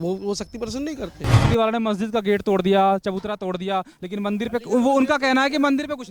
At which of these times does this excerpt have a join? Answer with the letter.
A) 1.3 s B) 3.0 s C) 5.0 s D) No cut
A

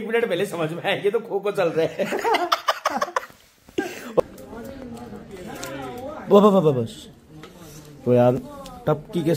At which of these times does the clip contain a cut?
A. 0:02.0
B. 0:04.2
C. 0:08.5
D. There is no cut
B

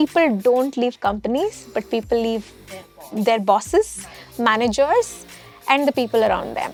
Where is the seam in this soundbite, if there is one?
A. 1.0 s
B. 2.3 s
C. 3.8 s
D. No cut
D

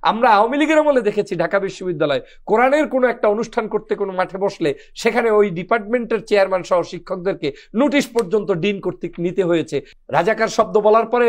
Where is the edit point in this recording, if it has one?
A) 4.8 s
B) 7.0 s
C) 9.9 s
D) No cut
C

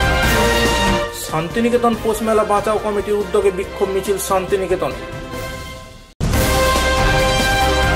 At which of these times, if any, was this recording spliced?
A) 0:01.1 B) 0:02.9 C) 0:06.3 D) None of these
A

